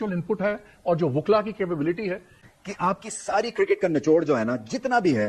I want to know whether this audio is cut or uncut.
cut